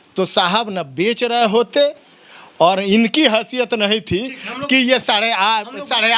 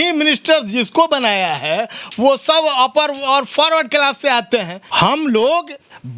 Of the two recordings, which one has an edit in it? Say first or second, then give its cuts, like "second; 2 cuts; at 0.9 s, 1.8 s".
second; 1 cut; at 4.8 s